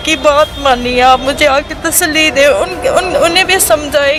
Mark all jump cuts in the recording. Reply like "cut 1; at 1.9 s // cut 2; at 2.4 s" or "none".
none